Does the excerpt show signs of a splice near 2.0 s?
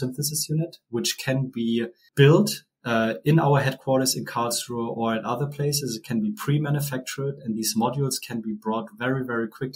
yes; 1 cut; at 2.0 s

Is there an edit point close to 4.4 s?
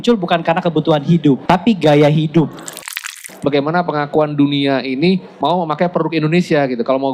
no; 2 cuts; at 1.4 s, 2.9 s

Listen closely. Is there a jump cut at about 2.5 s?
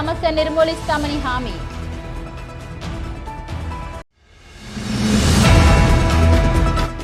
no; 0 cuts

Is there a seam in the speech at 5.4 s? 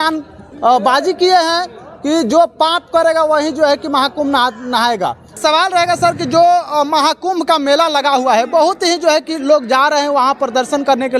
yes; 1 cut; at 5.4 s

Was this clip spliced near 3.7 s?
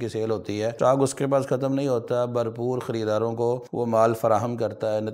yes; 2 cuts; at 0.7 s, 3.7 s

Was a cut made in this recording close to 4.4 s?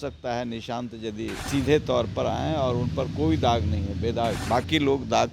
yes; 2 cuts; at 1.4 s, 4.4 s

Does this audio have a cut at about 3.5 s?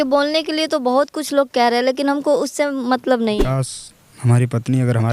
yes; 1 cut; at 3.5 s

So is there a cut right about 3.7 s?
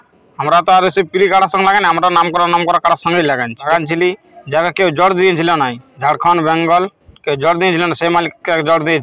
yes; 1 cut; at 3.7 s

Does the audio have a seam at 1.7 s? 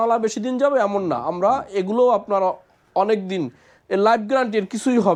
no; 0 cuts

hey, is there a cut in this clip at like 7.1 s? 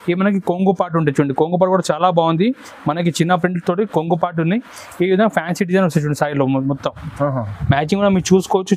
yes; 1 cut; at 7.1 s

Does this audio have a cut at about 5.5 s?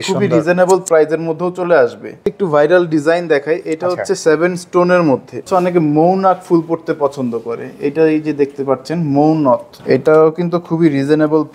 yes; 3 cuts; at 2.3 s, 5.5 s, 9.7 s

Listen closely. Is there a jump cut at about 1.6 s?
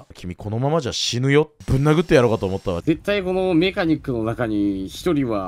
yes; 2 cuts; at 1.6 s, 2.8 s

